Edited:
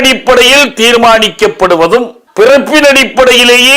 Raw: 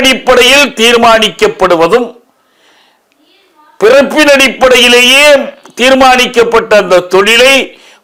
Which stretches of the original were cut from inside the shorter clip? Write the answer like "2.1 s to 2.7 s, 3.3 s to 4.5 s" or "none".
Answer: 2.2 s to 3.6 s